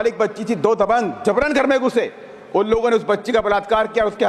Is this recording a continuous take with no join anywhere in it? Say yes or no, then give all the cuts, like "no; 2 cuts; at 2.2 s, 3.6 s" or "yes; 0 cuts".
yes; 0 cuts